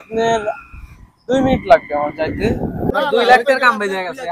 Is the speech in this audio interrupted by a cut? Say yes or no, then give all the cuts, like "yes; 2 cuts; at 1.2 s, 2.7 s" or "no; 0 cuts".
yes; 1 cut; at 2.9 s